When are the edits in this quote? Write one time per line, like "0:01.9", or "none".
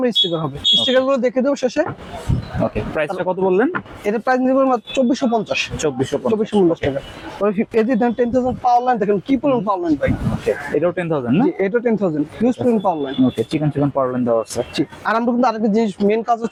none